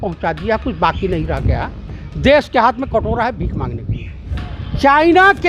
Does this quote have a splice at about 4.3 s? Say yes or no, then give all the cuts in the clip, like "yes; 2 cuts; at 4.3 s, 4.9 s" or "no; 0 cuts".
yes; 1 cut; at 4.3 s